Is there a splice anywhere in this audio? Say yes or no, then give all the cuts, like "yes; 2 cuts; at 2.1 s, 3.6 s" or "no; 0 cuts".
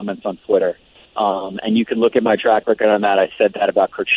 no; 0 cuts